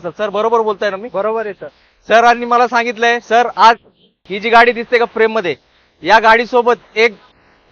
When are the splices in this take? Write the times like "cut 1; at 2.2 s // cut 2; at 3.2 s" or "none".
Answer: none